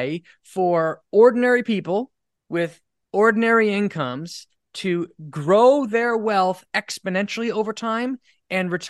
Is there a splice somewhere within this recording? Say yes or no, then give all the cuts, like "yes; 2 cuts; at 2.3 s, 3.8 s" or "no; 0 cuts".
no; 0 cuts